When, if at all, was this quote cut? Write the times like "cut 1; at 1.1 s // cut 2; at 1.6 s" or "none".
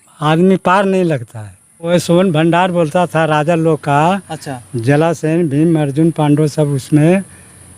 cut 1; at 1.9 s